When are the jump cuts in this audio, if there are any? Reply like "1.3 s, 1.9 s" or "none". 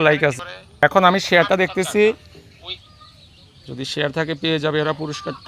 0.8 s, 2.6 s